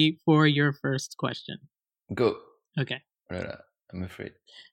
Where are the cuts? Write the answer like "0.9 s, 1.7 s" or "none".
none